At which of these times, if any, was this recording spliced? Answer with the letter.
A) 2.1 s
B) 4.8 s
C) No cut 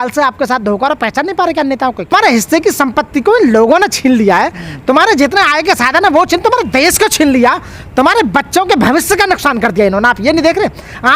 A